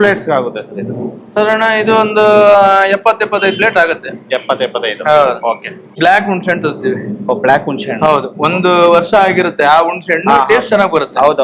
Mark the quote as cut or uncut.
cut